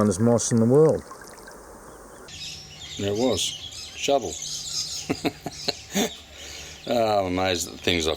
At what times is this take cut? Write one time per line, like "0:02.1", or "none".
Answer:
0:02.3